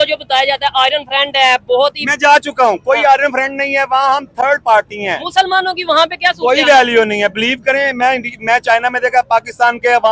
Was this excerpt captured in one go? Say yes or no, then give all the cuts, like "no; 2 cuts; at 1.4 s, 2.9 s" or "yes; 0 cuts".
yes; 0 cuts